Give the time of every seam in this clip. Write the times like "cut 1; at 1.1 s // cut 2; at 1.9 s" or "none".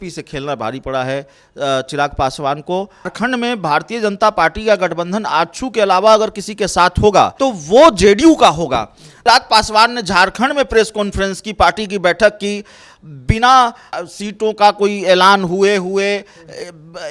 cut 1; at 3.1 s // cut 2; at 7.3 s // cut 3; at 9.2 s // cut 4; at 13.9 s